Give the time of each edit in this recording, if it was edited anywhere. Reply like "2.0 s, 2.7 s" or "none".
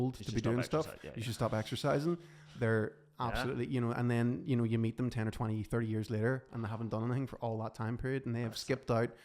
none